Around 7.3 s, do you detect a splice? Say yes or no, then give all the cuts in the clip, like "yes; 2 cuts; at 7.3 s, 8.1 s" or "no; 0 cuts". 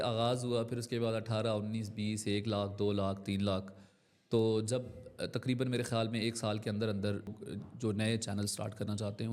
yes; 1 cut; at 7.3 s